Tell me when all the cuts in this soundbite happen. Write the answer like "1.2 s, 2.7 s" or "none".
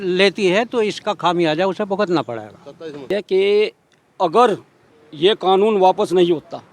3.1 s